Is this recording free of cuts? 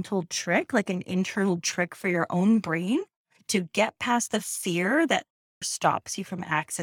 no; 1 cut; at 5.7 s

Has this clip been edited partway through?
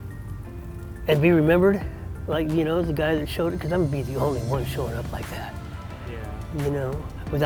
no; 0 cuts

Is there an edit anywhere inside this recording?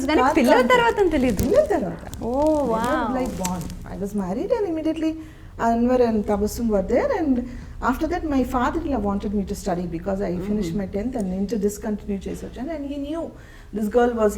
no; 0 cuts

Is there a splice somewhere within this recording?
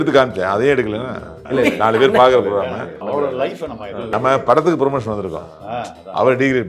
yes; 3 cuts; at 1.4 s, 3.0 s, 4.1 s

